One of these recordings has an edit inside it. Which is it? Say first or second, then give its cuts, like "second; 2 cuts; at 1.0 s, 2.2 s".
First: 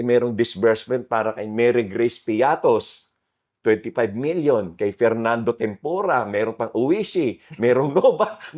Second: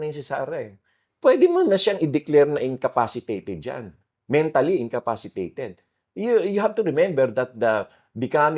second; 1 cut; at 1.1 s